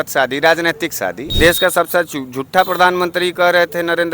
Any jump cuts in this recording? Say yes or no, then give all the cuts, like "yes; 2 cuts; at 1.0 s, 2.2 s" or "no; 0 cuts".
yes; 1 cut; at 1.2 s